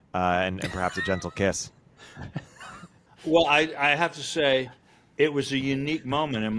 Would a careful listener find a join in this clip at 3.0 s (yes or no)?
yes